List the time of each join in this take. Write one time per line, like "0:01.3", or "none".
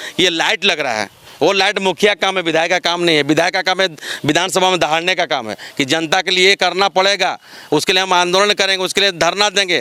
none